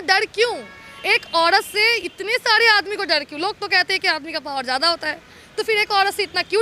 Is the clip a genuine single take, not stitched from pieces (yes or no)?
yes